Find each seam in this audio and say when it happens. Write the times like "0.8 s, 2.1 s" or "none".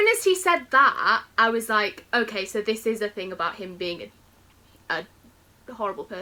none